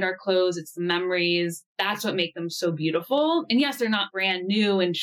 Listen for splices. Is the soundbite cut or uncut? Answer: cut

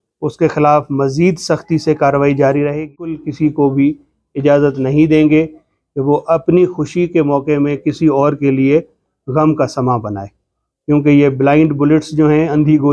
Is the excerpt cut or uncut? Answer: cut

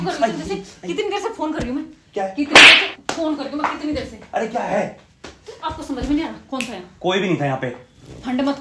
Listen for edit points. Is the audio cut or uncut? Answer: uncut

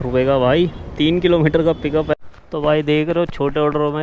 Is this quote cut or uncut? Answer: cut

